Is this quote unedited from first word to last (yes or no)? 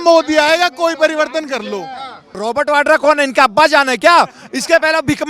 no